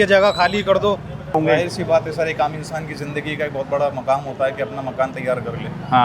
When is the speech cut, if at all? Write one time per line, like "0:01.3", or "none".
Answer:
0:01.3